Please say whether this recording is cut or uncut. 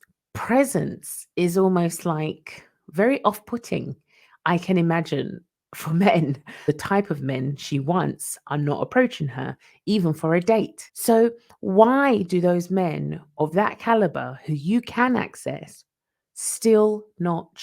cut